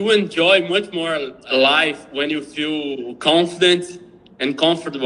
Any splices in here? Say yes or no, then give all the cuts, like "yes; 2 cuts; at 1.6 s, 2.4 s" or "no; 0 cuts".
yes; 1 cut; at 1.4 s